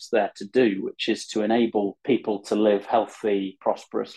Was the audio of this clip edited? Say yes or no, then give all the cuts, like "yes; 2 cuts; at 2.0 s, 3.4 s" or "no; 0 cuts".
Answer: yes; 1 cut; at 2.0 s